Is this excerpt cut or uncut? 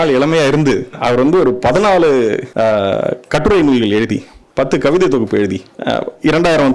cut